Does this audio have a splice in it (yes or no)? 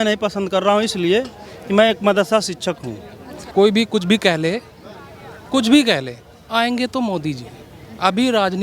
yes